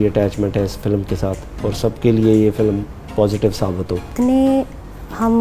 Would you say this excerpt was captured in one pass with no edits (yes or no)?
no